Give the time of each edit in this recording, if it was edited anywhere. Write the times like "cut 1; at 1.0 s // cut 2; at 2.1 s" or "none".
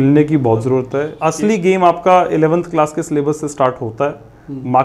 cut 1; at 1.1 s